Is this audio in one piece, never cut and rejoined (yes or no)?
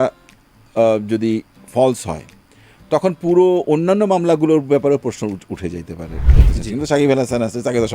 no